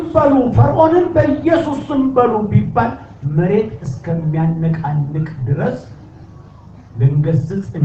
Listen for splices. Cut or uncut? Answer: uncut